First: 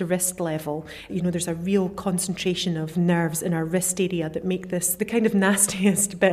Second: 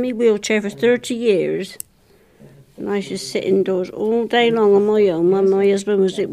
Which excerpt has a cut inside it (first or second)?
first